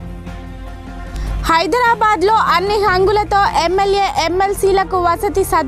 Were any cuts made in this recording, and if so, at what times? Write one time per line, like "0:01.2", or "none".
0:01.0